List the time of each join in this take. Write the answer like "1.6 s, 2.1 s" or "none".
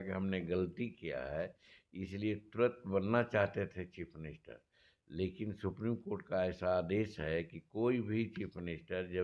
none